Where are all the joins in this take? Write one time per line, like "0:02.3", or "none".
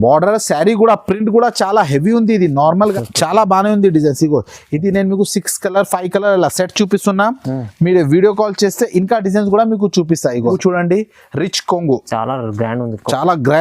0:02.9
0:10.5